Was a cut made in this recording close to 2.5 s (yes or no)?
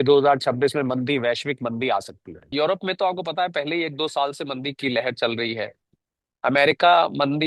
yes